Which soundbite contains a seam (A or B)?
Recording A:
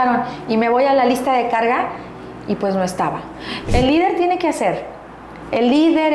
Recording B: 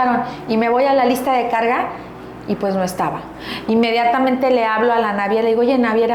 A